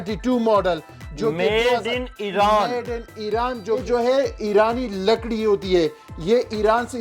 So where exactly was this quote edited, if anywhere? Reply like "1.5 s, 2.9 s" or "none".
3.8 s